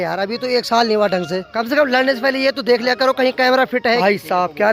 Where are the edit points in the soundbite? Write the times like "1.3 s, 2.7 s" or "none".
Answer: 1.5 s, 4.0 s